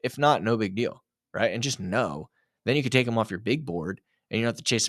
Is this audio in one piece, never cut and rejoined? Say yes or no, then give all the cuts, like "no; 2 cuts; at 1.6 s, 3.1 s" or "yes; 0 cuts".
yes; 0 cuts